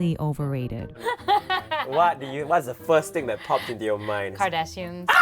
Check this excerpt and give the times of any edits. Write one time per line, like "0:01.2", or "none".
0:04.3